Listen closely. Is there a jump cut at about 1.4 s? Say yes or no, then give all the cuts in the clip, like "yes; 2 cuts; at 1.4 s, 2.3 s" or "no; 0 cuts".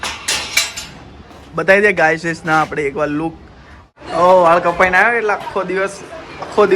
no; 1 cut; at 3.9 s